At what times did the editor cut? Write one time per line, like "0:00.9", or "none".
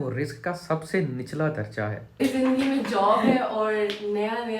0:02.2